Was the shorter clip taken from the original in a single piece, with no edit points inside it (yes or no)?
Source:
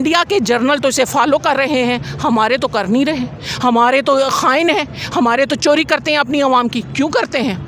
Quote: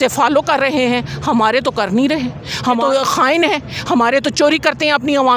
no